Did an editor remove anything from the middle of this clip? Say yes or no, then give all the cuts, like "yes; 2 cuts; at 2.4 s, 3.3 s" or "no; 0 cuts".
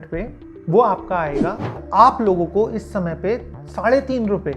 yes; 1 cut; at 1.8 s